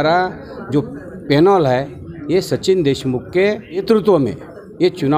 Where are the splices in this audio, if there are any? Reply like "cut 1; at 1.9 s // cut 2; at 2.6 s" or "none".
cut 1; at 3.8 s